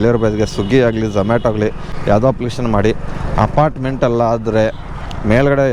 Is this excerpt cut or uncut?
uncut